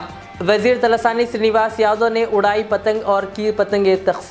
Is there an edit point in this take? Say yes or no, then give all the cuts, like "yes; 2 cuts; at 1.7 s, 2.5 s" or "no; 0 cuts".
no; 0 cuts